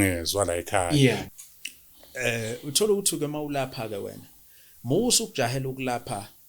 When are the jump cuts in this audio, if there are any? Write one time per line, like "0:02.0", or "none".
0:01.2